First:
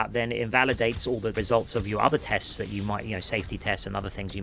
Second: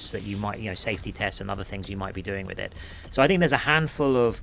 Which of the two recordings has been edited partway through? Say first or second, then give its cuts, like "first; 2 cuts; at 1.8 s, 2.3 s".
first; 1 cut; at 1.3 s